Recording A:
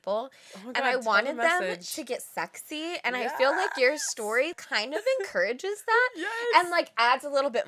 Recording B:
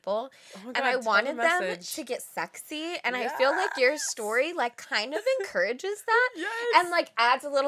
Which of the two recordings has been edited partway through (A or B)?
A